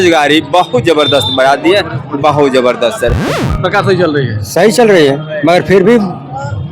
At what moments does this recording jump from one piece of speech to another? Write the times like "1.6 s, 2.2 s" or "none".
3.3 s